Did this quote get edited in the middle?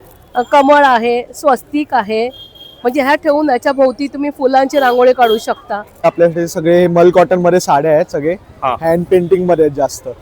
yes; 1 cut; at 6.0 s

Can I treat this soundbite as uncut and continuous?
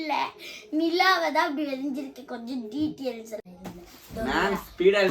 no; 1 cut; at 3.4 s

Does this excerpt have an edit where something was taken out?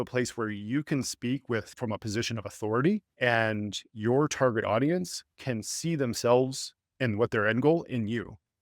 yes; 2 cuts; at 1.7 s, 3.1 s

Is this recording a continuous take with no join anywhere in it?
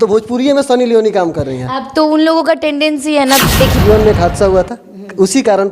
no; 1 cut; at 3.8 s

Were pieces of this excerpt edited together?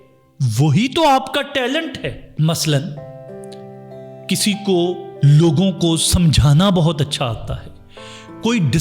no; 0 cuts

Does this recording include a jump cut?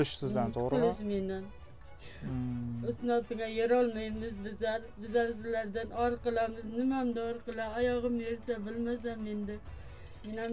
no; 0 cuts

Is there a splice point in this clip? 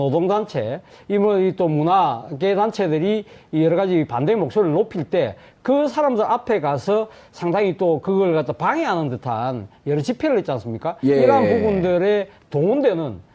yes; 1 cut; at 5.8 s

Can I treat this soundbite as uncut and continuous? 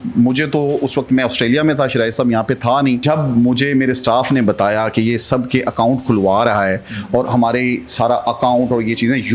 no; 1 cut; at 3.0 s

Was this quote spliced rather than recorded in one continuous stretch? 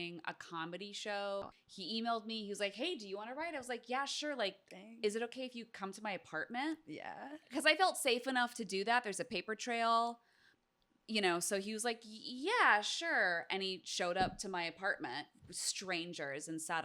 yes; 1 cut; at 1.5 s

